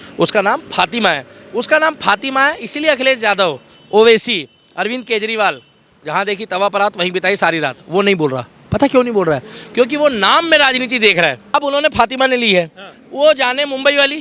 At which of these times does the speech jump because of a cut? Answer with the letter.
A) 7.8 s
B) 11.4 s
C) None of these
B